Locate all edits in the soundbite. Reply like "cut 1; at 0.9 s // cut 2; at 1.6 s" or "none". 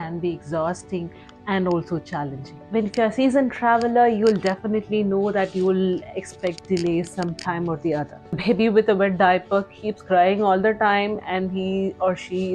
cut 1; at 2.5 s // cut 2; at 8.4 s

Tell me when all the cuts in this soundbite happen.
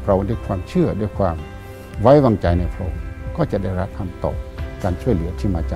none

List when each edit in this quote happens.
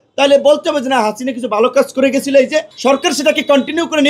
cut 1; at 2.7 s

